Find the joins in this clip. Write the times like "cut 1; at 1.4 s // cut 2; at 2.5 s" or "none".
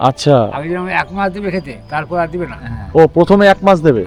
none